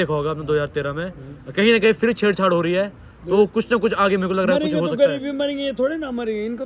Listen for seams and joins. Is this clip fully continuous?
yes; 0 cuts

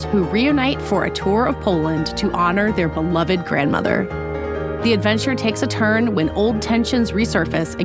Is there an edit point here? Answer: no; 0 cuts

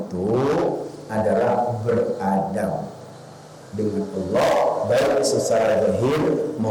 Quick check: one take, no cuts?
yes; 0 cuts

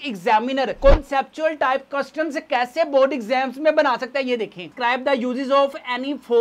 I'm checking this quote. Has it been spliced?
yes; 1 cut; at 4.7 s

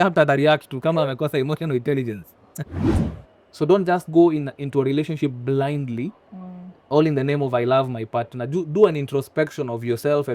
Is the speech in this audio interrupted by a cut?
yes; 1 cut; at 2.9 s

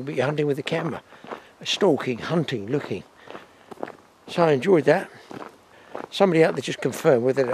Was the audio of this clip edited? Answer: no; 0 cuts

